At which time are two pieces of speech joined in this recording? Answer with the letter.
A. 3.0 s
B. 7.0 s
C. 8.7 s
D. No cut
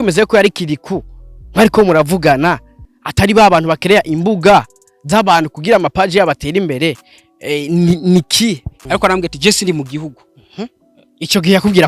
C